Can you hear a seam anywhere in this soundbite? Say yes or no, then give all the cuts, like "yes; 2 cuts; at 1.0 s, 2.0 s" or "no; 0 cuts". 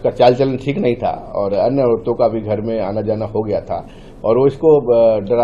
no; 0 cuts